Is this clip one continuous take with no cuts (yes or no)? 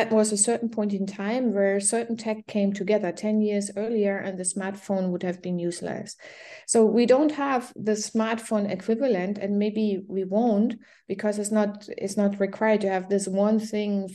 yes